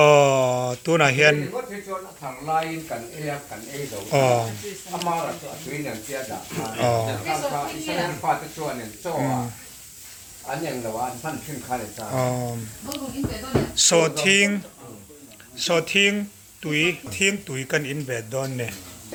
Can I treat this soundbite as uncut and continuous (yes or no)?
yes